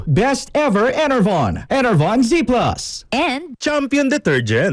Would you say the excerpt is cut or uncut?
cut